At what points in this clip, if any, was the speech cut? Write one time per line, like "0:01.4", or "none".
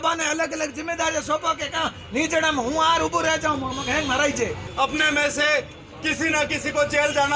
0:04.6